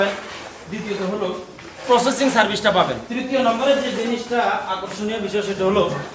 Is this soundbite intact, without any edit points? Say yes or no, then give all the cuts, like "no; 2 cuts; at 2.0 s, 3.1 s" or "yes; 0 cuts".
no; 1 cut; at 3.1 s